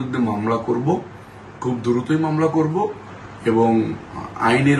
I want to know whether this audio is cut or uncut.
uncut